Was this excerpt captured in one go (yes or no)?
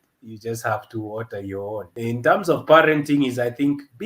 no